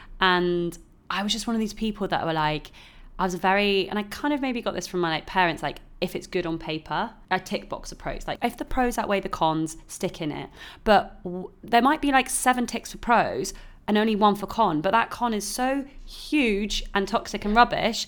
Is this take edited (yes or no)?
yes